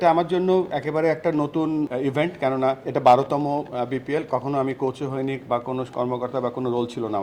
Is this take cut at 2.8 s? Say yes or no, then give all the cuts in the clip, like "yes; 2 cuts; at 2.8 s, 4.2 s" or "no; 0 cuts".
yes; 2 cuts; at 1.9 s, 2.8 s